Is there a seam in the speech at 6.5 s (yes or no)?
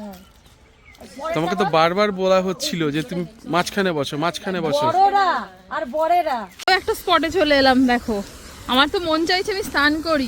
yes